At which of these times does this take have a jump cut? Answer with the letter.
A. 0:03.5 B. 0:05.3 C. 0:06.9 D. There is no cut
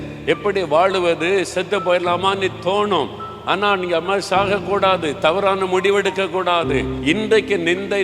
C